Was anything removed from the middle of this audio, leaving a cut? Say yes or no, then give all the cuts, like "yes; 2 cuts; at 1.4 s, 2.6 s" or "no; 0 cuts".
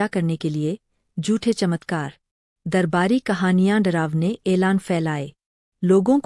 no; 0 cuts